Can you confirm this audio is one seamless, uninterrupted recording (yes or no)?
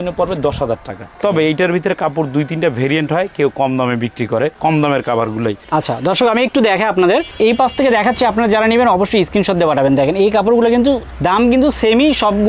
yes